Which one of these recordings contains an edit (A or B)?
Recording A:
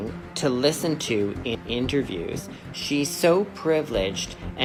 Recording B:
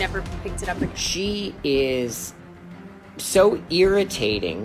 B